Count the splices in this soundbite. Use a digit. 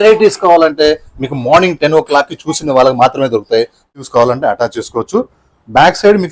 1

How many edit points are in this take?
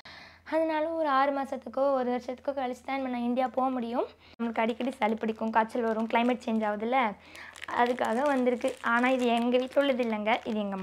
1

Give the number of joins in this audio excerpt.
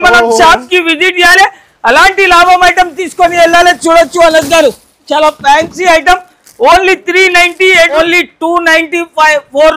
1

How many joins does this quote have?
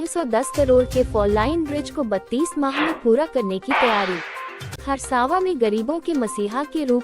1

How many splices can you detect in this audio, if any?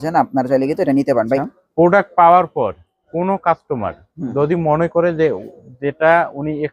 1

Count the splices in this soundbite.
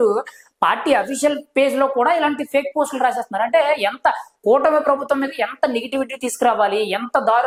0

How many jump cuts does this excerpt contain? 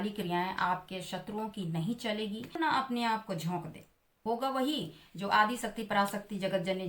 1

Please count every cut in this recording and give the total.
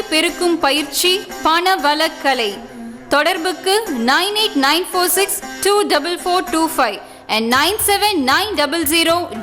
0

